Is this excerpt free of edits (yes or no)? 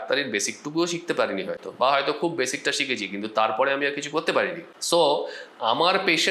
yes